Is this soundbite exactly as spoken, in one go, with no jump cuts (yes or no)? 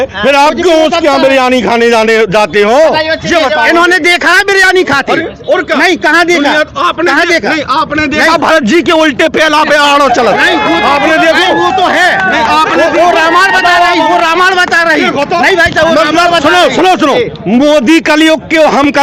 yes